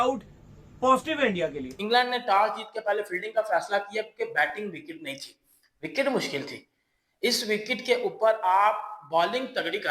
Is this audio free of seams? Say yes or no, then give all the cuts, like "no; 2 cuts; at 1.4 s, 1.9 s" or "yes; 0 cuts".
no; 1 cut; at 1.7 s